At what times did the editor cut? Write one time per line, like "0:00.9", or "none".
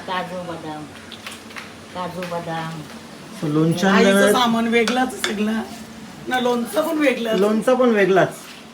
none